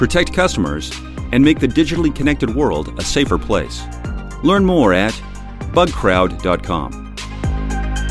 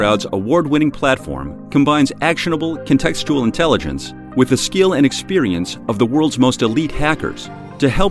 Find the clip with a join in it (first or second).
first